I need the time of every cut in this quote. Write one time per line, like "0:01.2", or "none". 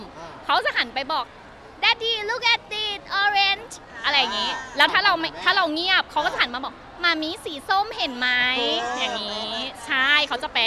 none